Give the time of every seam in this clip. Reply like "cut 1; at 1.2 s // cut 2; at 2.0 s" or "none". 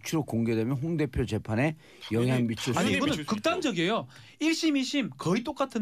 none

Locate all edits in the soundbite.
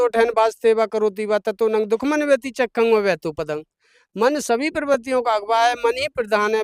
none

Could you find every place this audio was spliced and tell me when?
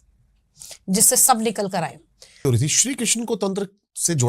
cut 1; at 2.5 s

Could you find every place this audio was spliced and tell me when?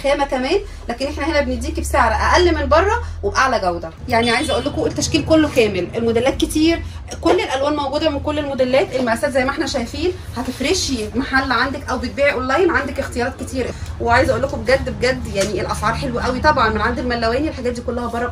cut 1; at 3.9 s // cut 2; at 13.7 s

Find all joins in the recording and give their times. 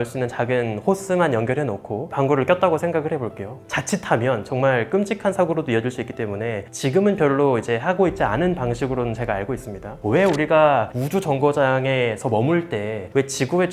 cut 1; at 3.6 s // cut 2; at 10.0 s

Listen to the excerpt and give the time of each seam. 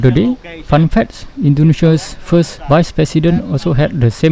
none

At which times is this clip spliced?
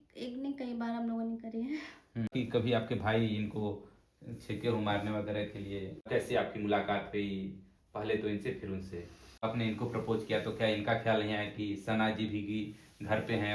cut 1; at 2.3 s // cut 2; at 6.1 s // cut 3; at 9.4 s

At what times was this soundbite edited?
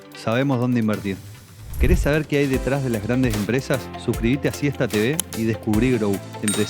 cut 1; at 1.7 s

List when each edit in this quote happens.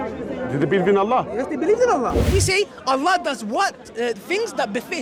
cut 1; at 2.2 s

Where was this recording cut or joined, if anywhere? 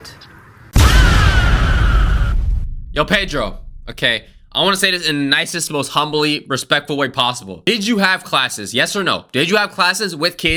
none

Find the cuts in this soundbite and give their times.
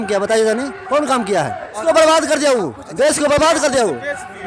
cut 1; at 1.8 s

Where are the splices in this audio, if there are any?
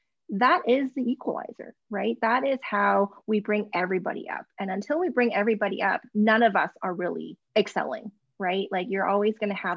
cut 1; at 7.3 s

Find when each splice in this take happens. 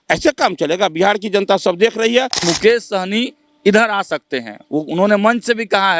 cut 1; at 2.4 s

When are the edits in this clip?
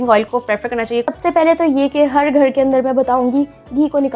cut 1; at 1.1 s

